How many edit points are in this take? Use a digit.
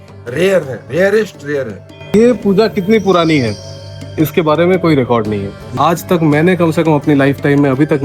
2